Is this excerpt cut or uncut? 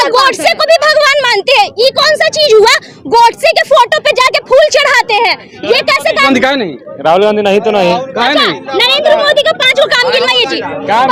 uncut